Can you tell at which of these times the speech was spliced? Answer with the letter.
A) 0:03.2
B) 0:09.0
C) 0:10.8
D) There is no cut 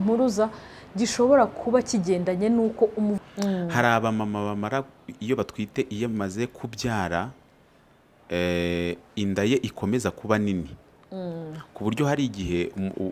A